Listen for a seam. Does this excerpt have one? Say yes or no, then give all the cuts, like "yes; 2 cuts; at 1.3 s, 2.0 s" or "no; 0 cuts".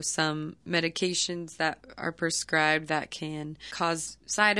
yes; 1 cut; at 3.7 s